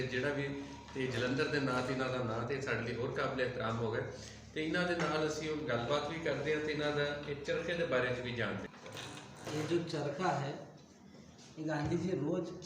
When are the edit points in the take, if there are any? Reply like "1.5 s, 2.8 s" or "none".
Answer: 8.7 s